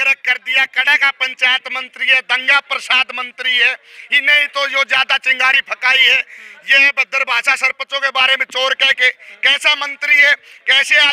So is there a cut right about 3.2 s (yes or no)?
no